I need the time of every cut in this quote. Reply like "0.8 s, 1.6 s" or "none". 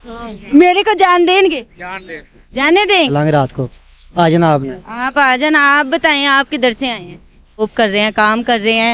3.1 s, 7.6 s